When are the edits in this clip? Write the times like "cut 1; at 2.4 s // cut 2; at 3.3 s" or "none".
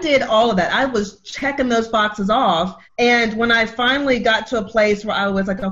cut 1; at 2.8 s

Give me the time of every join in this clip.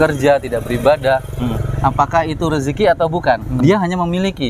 cut 1; at 3.5 s

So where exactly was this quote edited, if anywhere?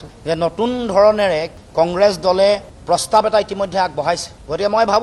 none

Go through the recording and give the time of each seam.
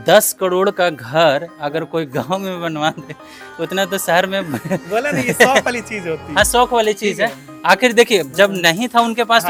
none

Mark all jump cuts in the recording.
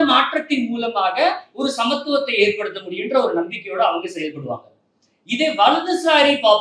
none

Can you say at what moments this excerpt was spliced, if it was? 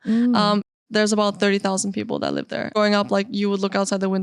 cut 1; at 2.7 s

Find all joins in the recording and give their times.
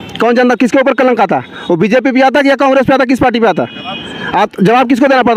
none

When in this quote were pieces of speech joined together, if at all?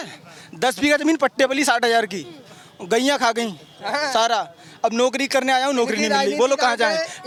none

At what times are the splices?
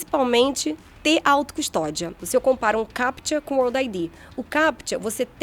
cut 1; at 2.2 s

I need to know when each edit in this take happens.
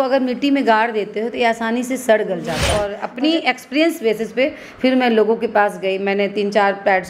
cut 1; at 2.6 s

